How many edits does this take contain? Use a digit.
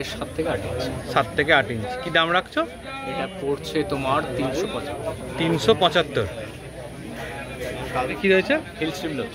0